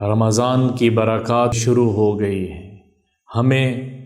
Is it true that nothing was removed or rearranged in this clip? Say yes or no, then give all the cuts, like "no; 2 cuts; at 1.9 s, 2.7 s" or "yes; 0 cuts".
no; 1 cut; at 1.6 s